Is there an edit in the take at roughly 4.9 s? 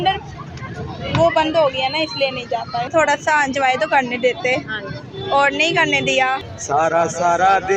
no; 2 cuts; at 2.9 s, 6.4 s

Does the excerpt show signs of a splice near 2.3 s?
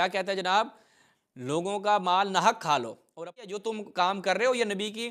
no; 1 cut; at 3.6 s

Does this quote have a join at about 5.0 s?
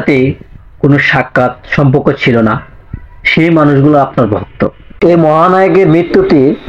yes; 1 cut; at 5.0 s

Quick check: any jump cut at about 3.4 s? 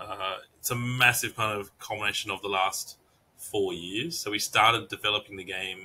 no; 0 cuts

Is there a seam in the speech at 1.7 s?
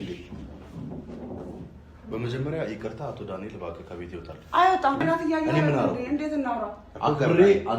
no; 1 cut; at 5.0 s

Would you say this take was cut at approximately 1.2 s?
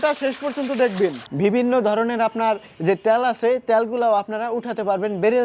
yes; 1 cut; at 1.2 s

